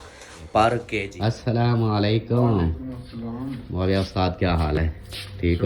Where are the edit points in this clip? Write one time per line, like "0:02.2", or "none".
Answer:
0:01.0